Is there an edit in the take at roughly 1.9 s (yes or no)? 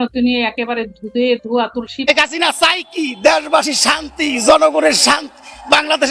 yes